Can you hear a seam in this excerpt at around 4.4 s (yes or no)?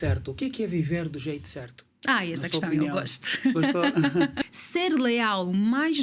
yes